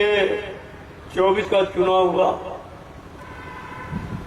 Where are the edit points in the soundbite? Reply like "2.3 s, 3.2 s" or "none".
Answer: 1.4 s